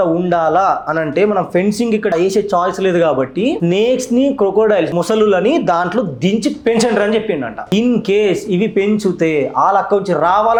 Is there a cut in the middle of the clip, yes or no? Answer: no